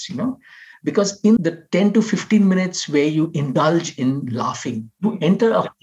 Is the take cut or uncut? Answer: cut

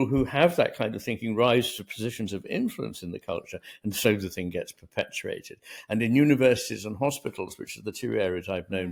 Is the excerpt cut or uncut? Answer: uncut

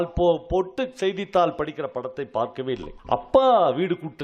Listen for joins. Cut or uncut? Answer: cut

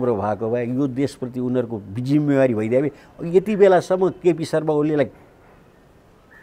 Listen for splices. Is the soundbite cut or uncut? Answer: uncut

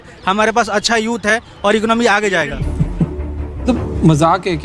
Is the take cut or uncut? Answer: cut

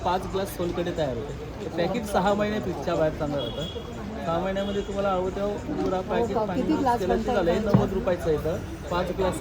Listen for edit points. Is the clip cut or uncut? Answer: uncut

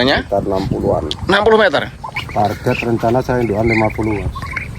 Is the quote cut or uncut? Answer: cut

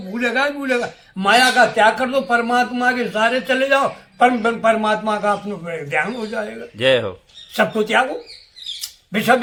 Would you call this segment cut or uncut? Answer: uncut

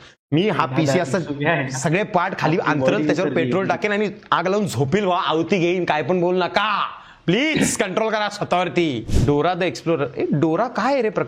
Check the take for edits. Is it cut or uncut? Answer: cut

